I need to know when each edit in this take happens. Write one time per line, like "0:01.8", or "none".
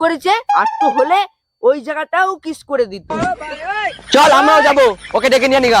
none